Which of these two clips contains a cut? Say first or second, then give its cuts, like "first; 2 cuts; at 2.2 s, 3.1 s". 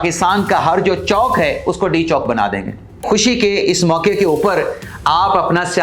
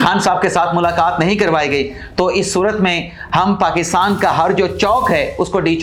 first; 1 cut; at 3.0 s